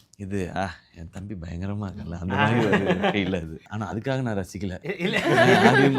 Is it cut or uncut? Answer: cut